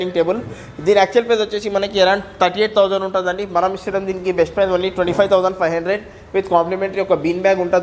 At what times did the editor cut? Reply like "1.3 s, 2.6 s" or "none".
none